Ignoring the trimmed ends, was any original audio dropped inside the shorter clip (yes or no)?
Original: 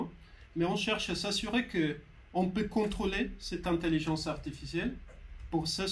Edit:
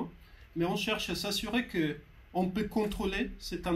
no